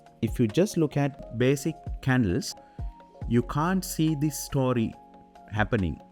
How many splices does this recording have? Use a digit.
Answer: 0